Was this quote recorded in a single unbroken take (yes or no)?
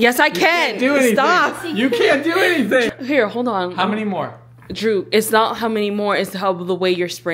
yes